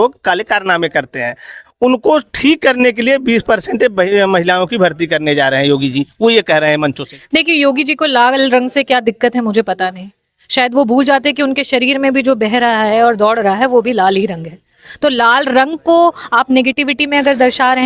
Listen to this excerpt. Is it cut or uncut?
cut